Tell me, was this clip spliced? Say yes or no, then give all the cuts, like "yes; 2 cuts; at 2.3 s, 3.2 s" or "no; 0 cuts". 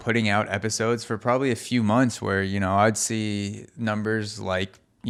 no; 0 cuts